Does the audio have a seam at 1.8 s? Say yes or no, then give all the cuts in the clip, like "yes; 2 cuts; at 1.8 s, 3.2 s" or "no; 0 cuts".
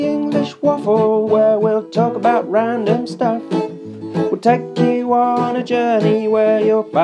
no; 0 cuts